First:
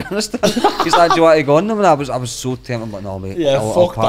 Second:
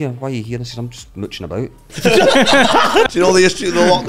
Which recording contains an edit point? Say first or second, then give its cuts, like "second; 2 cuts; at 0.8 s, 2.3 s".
second; 2 cuts; at 1.9 s, 3.1 s